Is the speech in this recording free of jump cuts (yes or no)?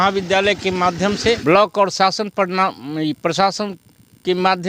no